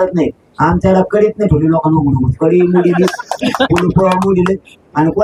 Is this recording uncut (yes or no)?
yes